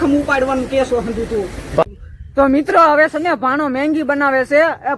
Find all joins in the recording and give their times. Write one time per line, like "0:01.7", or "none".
0:01.8